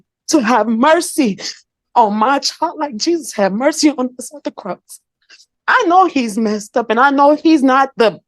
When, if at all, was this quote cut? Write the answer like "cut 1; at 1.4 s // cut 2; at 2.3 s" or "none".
none